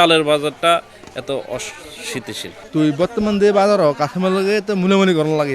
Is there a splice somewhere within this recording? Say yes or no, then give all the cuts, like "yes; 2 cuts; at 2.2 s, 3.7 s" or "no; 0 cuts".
yes; 1 cut; at 2.5 s